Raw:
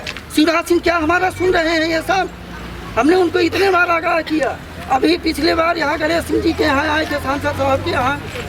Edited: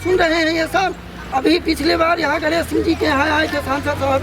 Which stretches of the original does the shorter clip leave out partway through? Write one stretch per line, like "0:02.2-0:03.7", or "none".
0:02.5-0:04.7